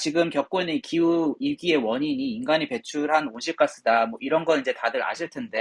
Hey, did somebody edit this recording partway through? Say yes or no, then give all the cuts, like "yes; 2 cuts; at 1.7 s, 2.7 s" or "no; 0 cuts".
no; 0 cuts